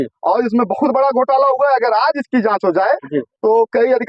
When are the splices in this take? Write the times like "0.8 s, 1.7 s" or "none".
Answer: none

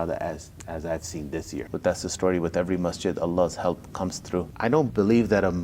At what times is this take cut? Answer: 1.7 s, 4.5 s

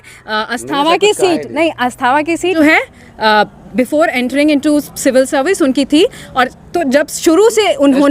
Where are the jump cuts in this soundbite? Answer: 2.5 s

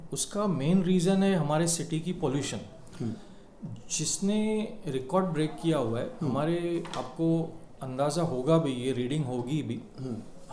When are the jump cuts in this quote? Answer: none

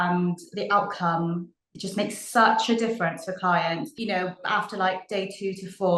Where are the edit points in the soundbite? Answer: 3.9 s

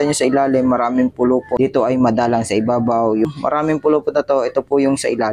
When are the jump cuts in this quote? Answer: 1.5 s, 3.3 s

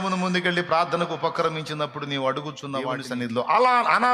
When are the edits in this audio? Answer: 3.0 s

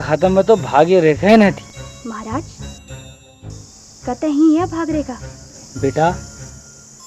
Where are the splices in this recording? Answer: 1.6 s

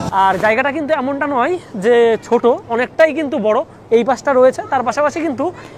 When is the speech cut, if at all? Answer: none

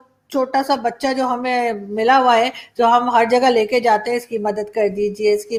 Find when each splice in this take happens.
none

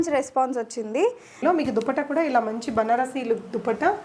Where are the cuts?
1.4 s

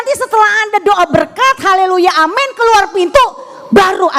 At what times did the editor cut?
none

